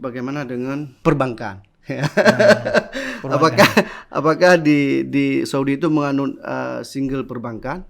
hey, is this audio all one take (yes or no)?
no